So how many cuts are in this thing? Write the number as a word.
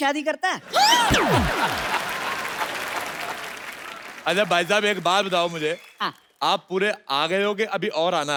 zero